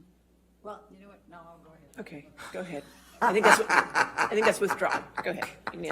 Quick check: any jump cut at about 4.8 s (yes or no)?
yes